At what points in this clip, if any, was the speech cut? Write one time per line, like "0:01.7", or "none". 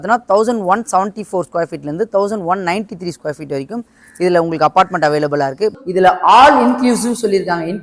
0:05.7